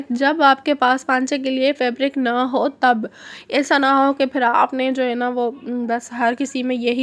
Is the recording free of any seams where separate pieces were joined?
yes; 0 cuts

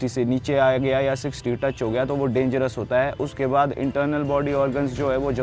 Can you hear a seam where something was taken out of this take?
no; 0 cuts

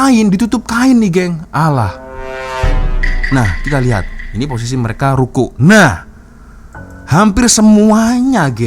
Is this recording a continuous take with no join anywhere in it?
yes; 0 cuts

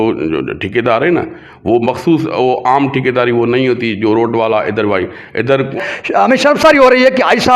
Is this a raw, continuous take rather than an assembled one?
no; 1 cut; at 5.8 s

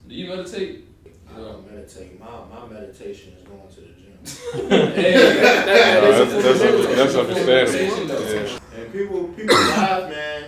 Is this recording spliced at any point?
yes; 2 cuts; at 1.0 s, 8.5 s

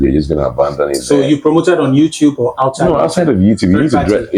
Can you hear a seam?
no; 0 cuts

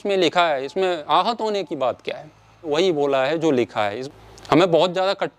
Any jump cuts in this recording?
yes; 2 cuts; at 2.7 s, 4.0 s

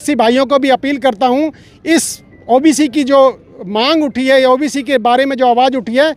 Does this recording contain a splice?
no; 0 cuts

